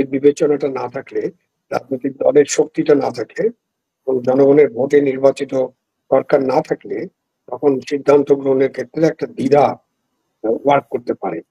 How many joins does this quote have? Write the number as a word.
zero